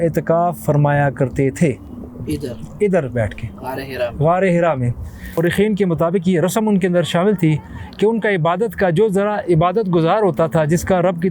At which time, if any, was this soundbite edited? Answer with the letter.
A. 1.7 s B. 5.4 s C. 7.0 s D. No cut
B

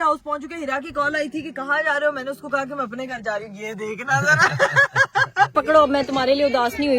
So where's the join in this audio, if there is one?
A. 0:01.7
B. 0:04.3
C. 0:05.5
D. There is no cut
C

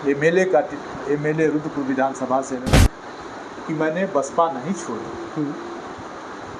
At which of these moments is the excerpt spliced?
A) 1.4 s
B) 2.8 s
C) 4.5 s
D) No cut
B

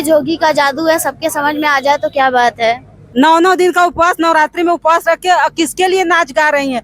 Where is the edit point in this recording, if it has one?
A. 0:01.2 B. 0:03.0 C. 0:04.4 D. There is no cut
B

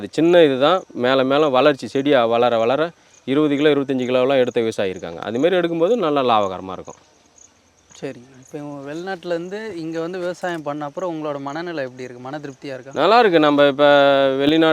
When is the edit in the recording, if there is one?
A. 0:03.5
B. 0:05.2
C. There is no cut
C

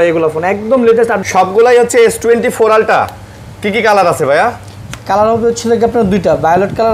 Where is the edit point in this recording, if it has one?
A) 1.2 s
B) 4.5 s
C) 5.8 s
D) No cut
A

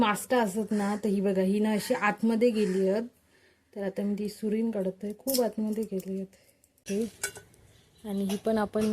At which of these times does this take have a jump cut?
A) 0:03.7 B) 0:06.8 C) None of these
B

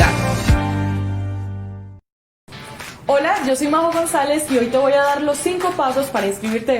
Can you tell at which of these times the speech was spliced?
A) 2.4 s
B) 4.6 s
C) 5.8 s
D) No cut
A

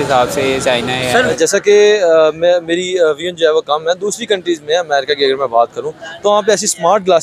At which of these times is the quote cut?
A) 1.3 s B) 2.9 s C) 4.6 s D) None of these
A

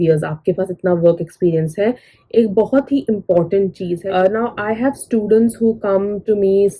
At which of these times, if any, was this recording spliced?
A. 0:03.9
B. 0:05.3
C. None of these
A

